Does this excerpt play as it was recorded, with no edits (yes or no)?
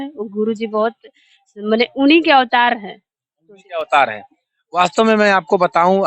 yes